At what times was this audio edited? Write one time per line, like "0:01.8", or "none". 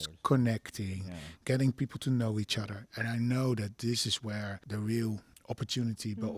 0:04.6
0:05.3

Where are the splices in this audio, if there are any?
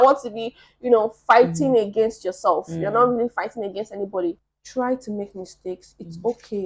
0:04.4

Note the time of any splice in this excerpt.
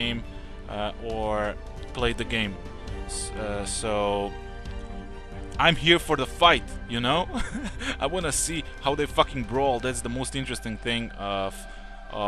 0:03.7

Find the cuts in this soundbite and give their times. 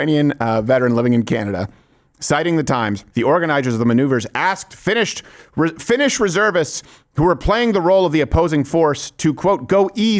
0:03.0

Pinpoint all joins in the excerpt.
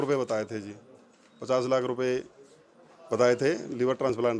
none

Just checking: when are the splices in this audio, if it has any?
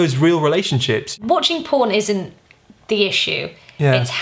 0:01.1

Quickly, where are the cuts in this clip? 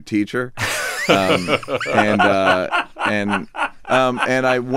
none

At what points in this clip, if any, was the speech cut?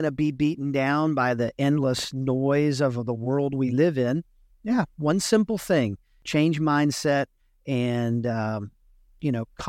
none

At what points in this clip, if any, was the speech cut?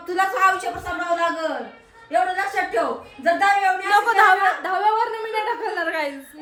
none

